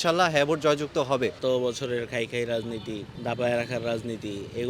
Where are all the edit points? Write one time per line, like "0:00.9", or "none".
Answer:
0:01.4
0:03.1